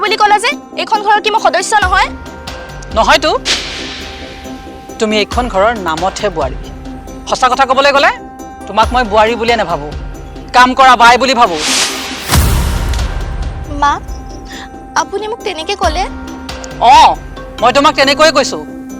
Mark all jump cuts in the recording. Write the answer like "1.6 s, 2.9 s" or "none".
none